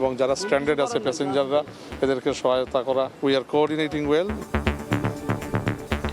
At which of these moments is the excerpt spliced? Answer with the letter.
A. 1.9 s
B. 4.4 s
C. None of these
B